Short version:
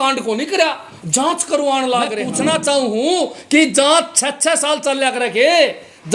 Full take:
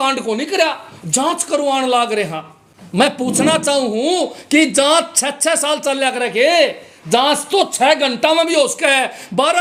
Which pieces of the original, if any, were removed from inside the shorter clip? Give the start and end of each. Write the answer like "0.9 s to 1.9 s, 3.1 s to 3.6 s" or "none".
2.2 s to 3.2 s